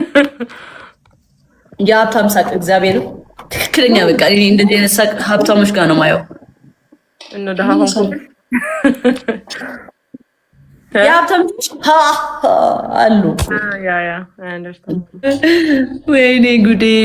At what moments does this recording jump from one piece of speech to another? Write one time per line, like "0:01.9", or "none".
0:15.2